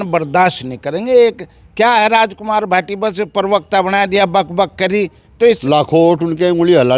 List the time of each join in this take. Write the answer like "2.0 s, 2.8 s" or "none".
5.6 s